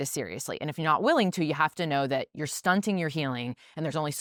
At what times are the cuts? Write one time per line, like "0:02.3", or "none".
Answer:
none